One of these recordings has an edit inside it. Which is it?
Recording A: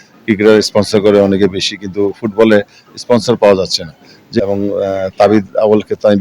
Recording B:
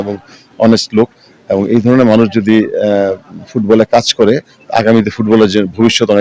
A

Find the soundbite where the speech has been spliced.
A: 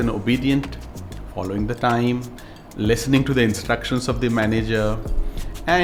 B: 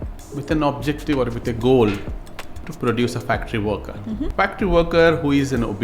B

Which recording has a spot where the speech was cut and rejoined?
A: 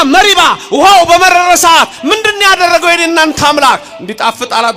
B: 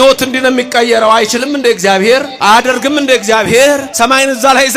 B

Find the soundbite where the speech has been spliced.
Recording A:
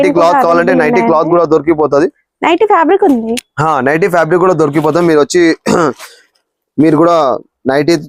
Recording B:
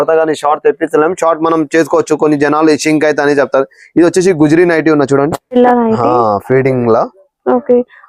B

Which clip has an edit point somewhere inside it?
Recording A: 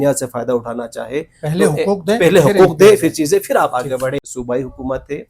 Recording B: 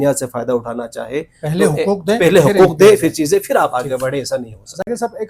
A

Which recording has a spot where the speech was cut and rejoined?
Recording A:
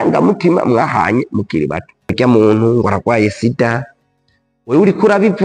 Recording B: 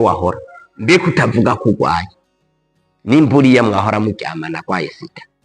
A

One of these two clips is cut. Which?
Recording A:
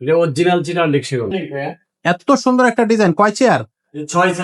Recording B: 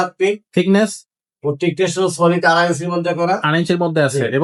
A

